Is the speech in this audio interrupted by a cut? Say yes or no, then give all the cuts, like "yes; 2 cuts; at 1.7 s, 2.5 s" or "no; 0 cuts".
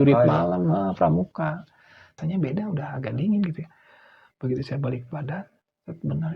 yes; 1 cut; at 2.0 s